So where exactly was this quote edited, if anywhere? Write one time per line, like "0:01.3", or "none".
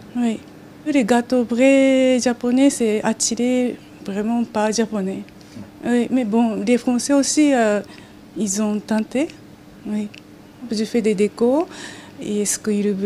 none